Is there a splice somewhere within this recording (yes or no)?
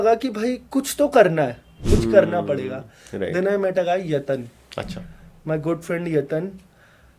yes